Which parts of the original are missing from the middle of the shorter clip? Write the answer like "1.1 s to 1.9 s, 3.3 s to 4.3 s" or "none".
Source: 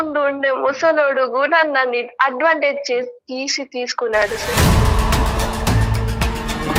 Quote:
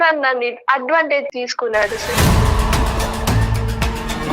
2.8 s to 3.7 s